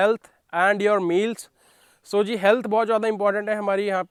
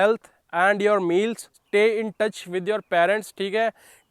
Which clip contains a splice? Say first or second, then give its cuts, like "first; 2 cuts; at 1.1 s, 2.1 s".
second; 1 cut; at 1.5 s